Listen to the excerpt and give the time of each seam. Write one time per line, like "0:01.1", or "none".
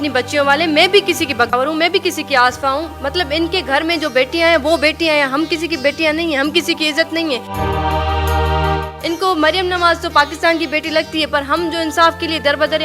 0:01.5